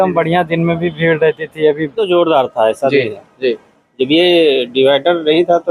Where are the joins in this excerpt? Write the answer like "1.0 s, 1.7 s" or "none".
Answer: 2.0 s